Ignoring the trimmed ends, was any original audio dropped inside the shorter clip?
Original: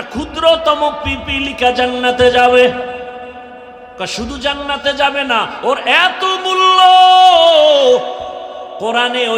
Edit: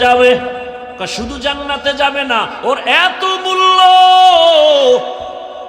yes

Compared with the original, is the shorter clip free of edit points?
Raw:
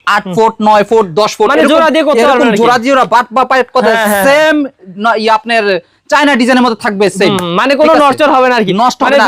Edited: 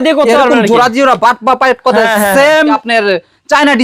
no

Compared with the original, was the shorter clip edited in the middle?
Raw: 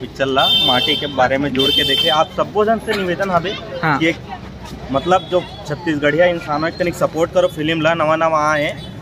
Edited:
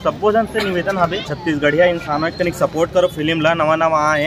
yes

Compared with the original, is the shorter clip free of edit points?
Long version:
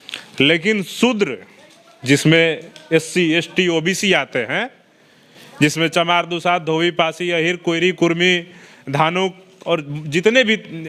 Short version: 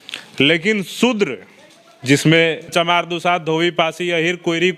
no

